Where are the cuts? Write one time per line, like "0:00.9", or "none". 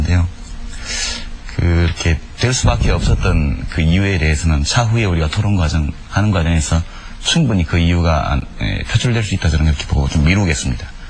0:03.2